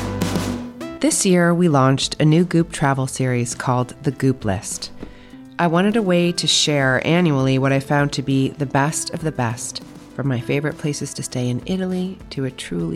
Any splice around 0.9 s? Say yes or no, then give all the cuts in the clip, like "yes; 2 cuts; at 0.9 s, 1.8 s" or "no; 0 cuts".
yes; 1 cut; at 0.9 s